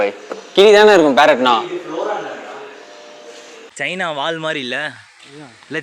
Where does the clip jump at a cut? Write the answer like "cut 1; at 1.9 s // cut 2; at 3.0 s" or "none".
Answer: cut 1; at 3.6 s